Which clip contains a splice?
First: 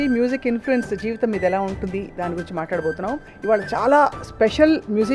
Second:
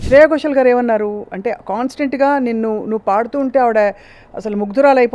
first; 1 cut; at 3.3 s

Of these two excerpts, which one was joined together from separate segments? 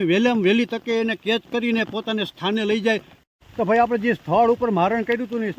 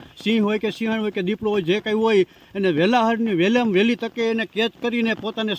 first; 1 cut; at 3.2 s

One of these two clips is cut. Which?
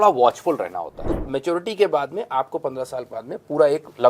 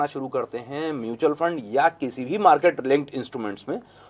first; 1 cut; at 1.1 s

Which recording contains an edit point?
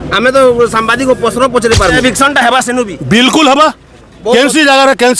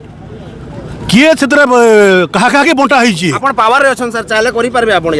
first; 1 cut; at 2.0 s

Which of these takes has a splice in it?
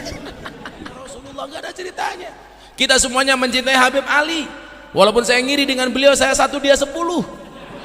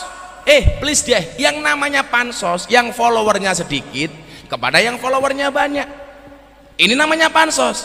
first; 1 cut; at 1.2 s

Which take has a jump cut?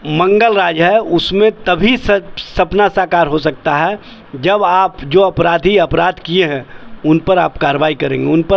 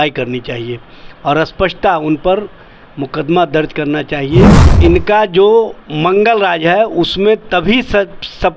second; 1 cut; at 4.6 s

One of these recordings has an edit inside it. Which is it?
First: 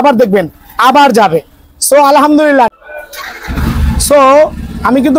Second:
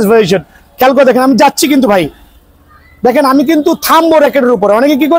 first; 1 cut; at 2.7 s

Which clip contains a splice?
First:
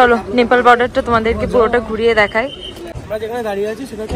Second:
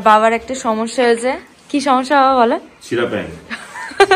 first; 1 cut; at 2.9 s

